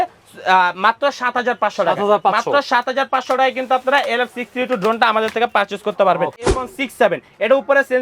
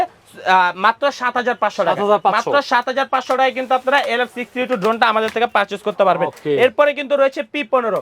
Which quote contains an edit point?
first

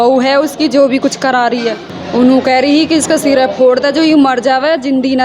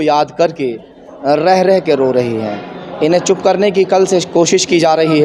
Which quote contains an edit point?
first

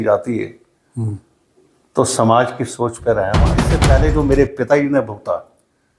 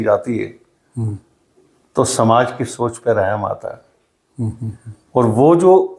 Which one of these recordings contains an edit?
first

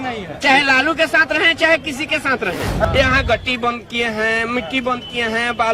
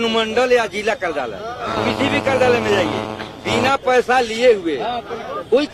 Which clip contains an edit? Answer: first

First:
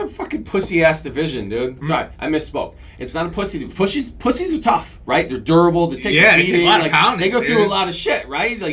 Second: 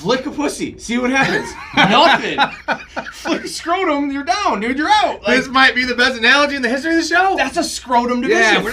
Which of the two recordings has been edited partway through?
first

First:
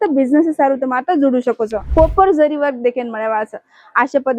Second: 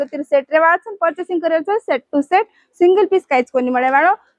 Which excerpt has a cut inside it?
first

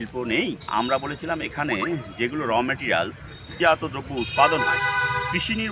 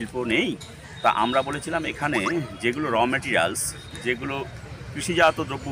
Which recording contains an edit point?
first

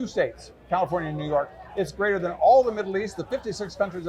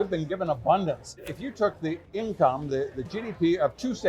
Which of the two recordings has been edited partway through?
second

